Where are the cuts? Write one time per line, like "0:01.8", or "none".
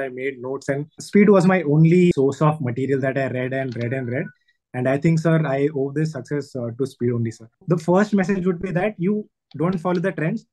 0:01.0
0:02.1
0:07.6

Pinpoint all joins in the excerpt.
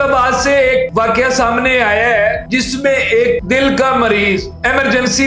0:00.9
0:02.4
0:03.4

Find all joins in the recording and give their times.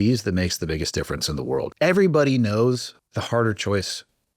0:01.7
0:03.0

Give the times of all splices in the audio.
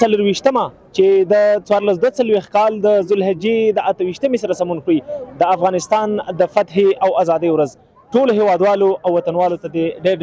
none

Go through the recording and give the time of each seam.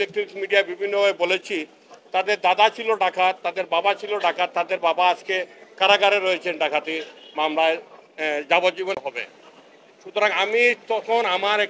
0:09.0

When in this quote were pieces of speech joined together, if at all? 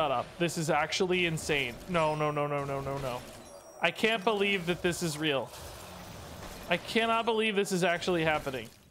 none

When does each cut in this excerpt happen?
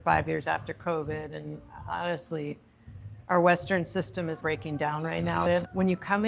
none

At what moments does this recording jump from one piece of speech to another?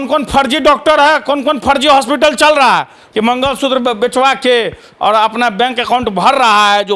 0:03.0

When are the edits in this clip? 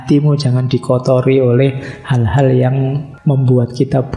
0:03.1

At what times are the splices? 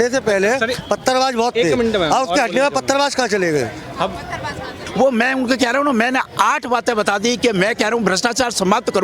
0:04.8

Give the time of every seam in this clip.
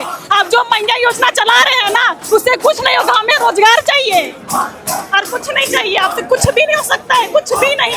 none

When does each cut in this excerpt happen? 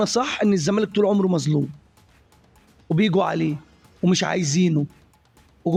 none

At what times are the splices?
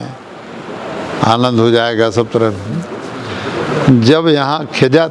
none

